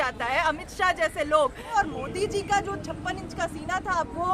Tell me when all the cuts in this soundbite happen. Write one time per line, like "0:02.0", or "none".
0:01.8